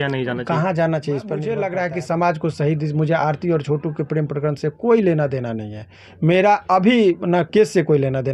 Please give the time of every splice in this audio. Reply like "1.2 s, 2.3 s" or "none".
1.5 s